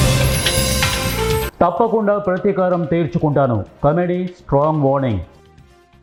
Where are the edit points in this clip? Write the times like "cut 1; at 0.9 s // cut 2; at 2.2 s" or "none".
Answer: none